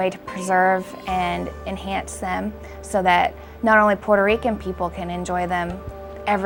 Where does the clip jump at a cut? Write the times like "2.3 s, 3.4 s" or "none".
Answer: none